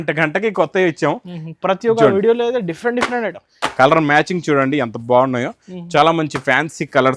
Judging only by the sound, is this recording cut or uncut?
uncut